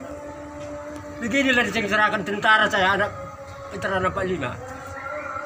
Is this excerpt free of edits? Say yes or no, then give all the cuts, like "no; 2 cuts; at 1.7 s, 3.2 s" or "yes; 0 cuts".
yes; 0 cuts